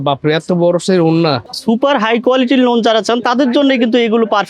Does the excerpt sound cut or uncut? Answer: cut